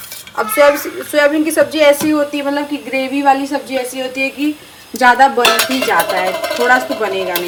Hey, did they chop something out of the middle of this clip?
no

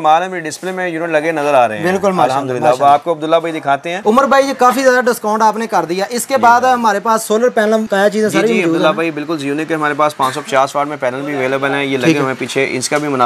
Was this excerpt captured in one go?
yes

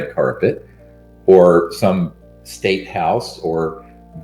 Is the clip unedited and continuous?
yes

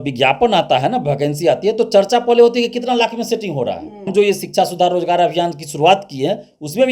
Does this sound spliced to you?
yes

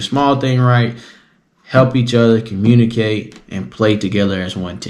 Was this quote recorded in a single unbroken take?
yes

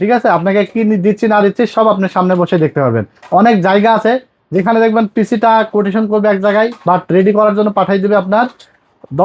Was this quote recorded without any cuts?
yes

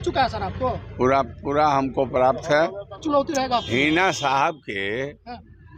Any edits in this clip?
yes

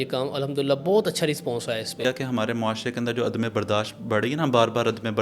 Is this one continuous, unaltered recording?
no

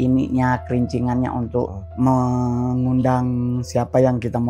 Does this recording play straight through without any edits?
no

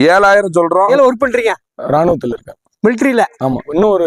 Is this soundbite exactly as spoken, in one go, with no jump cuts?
no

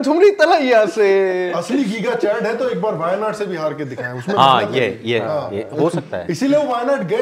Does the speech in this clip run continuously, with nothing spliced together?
yes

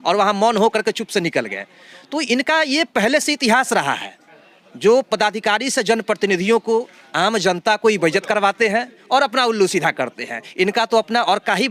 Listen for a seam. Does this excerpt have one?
no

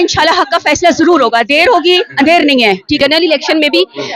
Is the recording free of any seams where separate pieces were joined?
no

